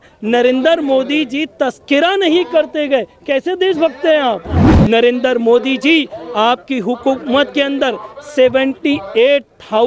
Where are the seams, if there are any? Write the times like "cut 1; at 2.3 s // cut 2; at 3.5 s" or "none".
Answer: cut 1; at 4.7 s